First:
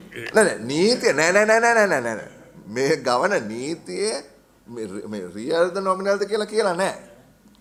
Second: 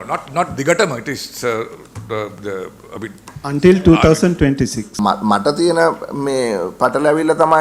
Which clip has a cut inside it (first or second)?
second